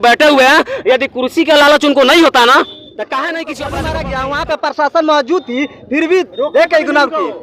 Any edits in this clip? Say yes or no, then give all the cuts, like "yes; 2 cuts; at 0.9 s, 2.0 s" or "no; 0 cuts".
yes; 1 cut; at 3.8 s